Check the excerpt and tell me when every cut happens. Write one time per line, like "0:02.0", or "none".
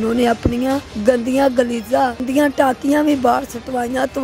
0:00.9
0:02.2